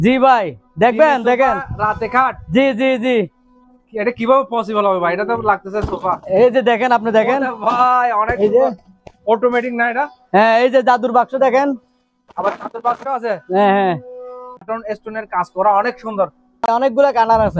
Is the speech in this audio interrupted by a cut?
yes; 2 cuts; at 14.7 s, 16.7 s

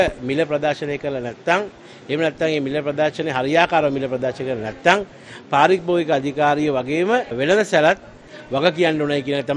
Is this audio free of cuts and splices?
yes; 0 cuts

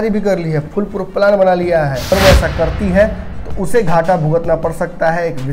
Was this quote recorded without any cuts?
no; 1 cut; at 2.1 s

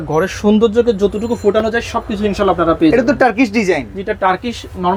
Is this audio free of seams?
yes; 0 cuts

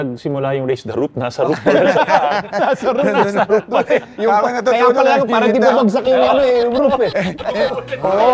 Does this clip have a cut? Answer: no; 0 cuts

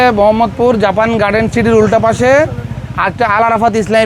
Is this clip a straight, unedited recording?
yes; 0 cuts

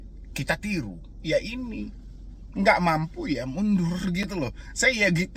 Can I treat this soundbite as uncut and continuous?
yes; 0 cuts

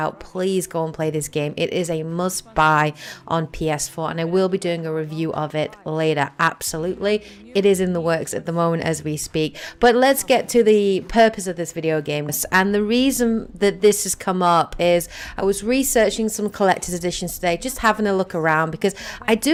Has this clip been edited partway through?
no; 0 cuts

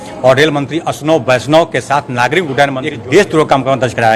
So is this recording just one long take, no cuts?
no; 1 cut; at 2.9 s

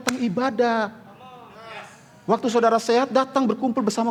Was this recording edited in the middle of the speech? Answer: no; 0 cuts

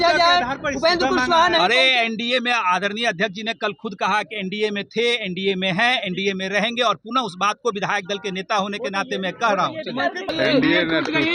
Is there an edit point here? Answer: yes; 1 cut; at 10.3 s

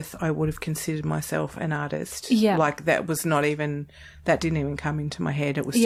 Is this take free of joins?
yes; 0 cuts

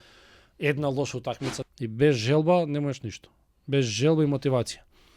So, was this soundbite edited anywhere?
yes; 1 cut; at 1.6 s

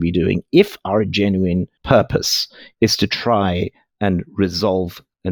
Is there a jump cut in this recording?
no; 0 cuts

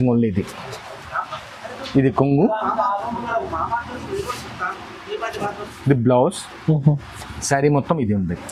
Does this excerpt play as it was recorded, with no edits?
yes; 0 cuts

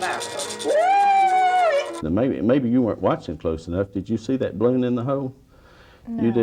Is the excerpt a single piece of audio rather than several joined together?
no; 1 cut; at 2.0 s

